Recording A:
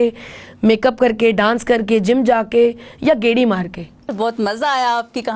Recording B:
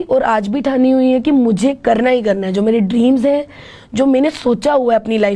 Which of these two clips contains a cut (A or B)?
A